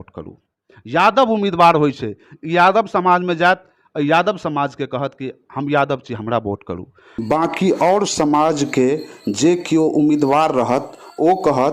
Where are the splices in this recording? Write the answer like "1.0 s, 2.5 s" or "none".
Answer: 7.2 s